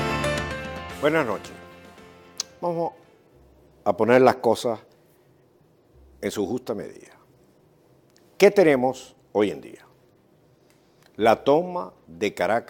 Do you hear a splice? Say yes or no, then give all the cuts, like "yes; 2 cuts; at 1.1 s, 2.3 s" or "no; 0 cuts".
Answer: no; 0 cuts